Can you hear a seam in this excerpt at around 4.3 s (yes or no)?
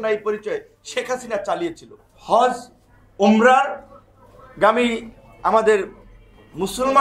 no